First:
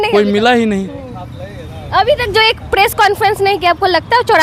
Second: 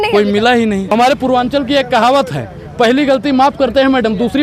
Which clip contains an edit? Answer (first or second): second